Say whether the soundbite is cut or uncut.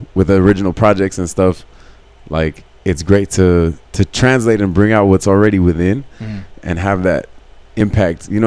cut